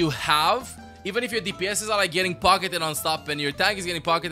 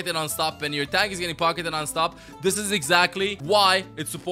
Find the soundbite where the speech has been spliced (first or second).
second